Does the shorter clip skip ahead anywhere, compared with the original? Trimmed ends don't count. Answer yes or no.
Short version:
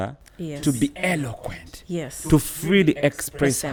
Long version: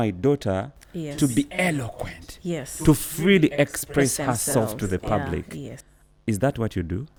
no